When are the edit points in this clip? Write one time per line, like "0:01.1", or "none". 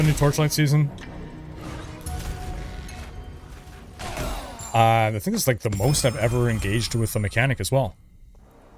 none